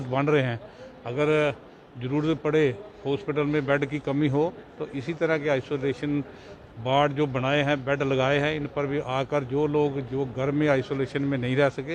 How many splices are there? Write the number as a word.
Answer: zero